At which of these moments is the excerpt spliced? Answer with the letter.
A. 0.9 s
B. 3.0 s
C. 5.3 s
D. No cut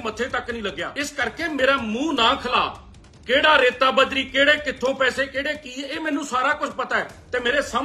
A